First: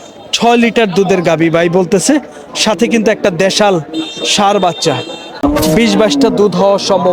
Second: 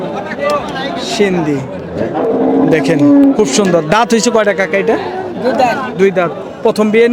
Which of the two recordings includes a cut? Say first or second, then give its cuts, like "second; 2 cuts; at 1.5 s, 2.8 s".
first; 1 cut; at 5.4 s